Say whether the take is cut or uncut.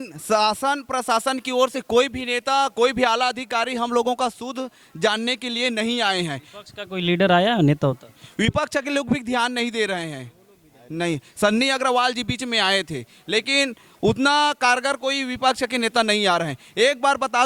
uncut